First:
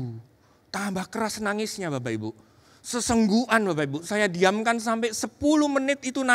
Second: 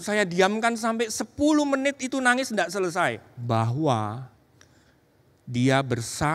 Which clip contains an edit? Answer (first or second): second